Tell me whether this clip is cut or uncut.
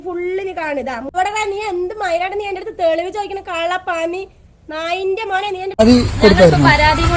cut